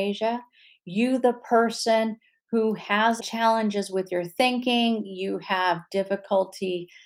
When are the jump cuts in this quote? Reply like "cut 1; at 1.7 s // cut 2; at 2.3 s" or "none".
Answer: cut 1; at 3.2 s